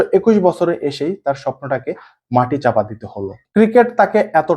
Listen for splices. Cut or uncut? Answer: cut